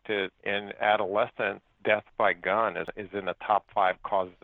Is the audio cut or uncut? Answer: cut